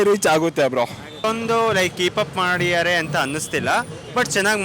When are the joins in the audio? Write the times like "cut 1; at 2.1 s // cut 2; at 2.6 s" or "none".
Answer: cut 1; at 1.2 s